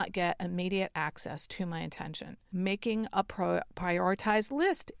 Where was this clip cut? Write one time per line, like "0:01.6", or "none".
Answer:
0:02.3